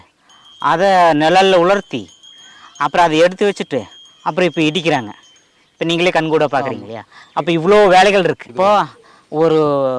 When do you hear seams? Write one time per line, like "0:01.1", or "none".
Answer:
0:08.5